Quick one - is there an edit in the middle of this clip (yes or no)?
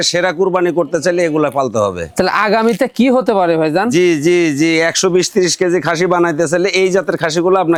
no